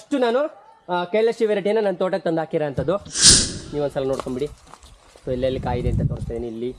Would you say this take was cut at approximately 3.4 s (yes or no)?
yes